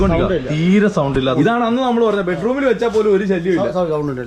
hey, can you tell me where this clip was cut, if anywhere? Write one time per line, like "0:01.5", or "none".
0:01.3